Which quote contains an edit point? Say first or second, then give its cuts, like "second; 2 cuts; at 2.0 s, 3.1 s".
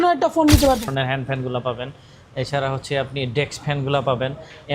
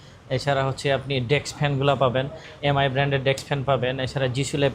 first; 1 cut; at 0.9 s